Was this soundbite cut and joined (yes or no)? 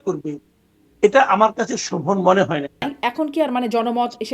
yes